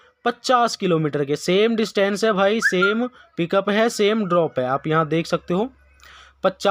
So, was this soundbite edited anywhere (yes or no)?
no